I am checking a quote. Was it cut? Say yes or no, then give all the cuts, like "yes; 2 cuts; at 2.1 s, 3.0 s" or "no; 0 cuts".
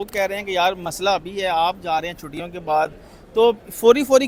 no; 0 cuts